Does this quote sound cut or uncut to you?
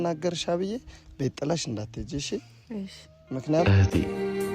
cut